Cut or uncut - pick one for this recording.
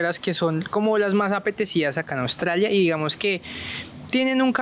uncut